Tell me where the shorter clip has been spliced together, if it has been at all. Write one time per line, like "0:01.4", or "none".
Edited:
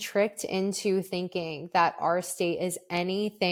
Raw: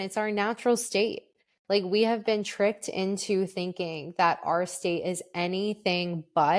none